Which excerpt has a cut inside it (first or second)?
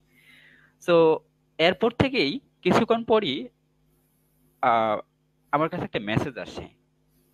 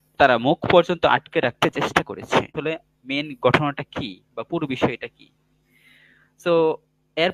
second